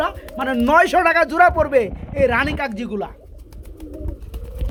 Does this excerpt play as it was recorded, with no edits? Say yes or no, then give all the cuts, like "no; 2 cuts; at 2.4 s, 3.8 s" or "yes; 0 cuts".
yes; 0 cuts